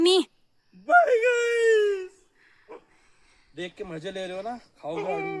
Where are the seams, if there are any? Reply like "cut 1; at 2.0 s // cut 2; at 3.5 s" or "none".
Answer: none